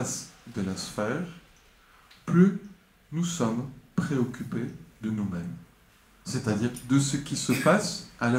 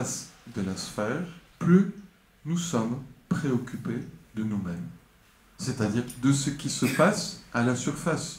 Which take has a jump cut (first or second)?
second